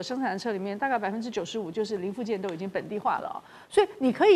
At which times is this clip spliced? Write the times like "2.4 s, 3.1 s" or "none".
none